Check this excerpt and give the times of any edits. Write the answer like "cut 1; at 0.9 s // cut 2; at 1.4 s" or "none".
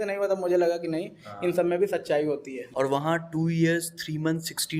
cut 1; at 2.6 s